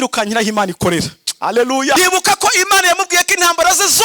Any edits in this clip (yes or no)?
yes